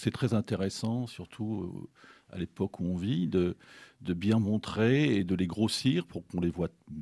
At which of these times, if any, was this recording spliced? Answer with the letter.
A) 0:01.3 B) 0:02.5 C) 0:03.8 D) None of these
C